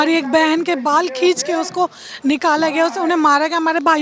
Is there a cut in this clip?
no; 0 cuts

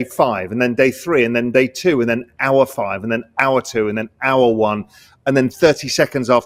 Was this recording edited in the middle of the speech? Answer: no; 0 cuts

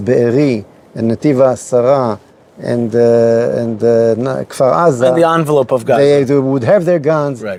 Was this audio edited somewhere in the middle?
no; 0 cuts

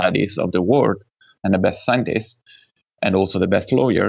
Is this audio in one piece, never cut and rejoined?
yes; 0 cuts

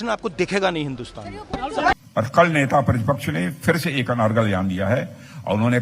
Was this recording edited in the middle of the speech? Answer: yes; 1 cut; at 1.9 s

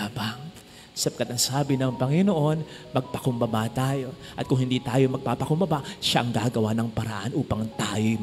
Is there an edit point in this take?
no; 0 cuts

